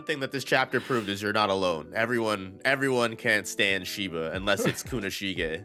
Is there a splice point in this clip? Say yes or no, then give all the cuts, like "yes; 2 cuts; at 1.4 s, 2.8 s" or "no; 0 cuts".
no; 0 cuts